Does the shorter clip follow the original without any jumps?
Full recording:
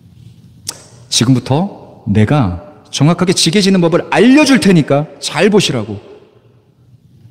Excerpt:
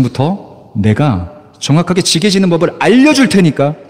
yes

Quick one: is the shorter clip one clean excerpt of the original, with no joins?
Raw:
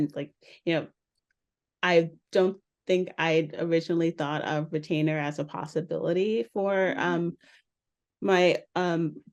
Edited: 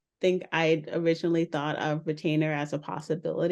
yes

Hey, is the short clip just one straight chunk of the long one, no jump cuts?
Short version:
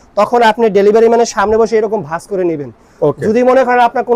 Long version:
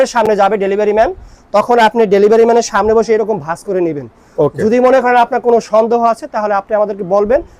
yes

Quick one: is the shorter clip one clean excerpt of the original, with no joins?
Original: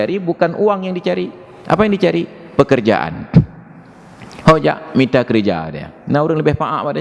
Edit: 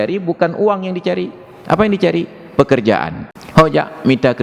no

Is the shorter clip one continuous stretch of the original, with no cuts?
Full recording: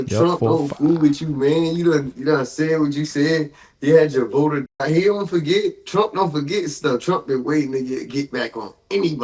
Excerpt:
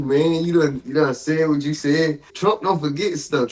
no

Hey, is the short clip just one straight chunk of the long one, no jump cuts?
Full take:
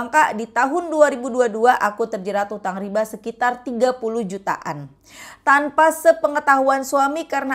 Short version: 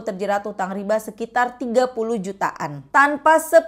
no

